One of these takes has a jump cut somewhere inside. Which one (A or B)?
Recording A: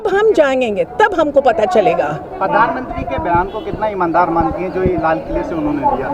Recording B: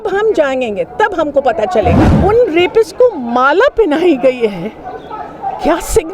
B